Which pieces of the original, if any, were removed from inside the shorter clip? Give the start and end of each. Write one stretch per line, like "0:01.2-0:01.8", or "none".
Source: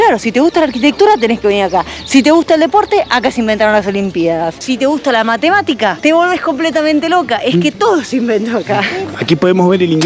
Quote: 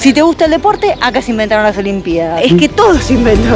0:04.5-0:07.4